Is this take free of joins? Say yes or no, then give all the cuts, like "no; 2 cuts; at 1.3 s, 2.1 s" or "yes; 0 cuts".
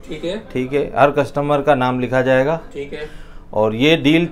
yes; 0 cuts